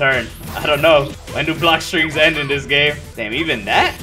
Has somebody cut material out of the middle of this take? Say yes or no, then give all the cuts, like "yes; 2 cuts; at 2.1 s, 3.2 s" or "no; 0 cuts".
yes; 2 cuts; at 1.2 s, 3.1 s